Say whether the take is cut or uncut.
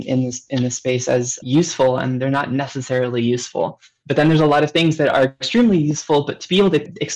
cut